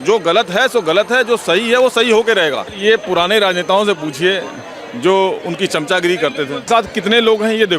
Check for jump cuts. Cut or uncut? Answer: cut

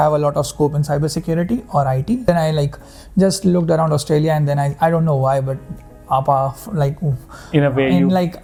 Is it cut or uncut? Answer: uncut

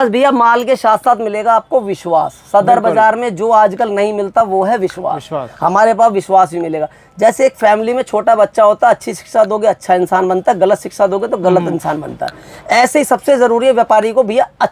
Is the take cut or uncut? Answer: uncut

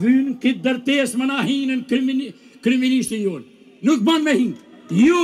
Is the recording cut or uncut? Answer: uncut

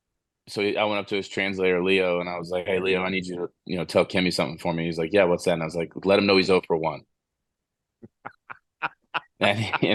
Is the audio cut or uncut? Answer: uncut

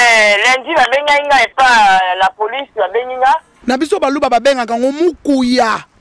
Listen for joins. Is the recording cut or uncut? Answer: cut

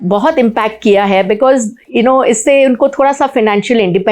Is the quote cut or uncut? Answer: uncut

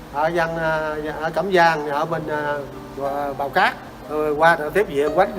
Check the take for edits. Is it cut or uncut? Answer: cut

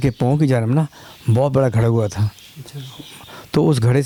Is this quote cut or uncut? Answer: uncut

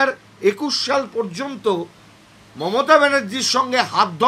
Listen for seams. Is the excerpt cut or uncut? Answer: uncut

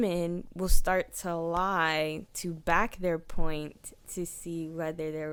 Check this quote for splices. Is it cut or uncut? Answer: uncut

